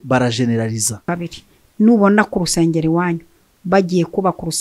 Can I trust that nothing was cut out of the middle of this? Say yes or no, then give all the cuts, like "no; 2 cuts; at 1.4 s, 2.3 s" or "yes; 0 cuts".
no; 1 cut; at 1.1 s